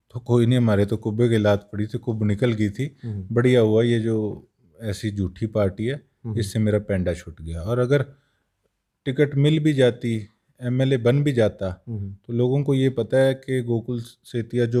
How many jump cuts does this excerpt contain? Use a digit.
0